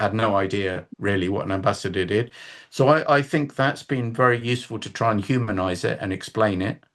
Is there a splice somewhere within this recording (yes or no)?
no